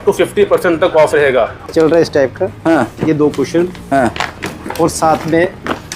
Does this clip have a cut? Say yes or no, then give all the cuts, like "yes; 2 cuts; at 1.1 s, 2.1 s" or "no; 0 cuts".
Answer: yes; 1 cut; at 1.7 s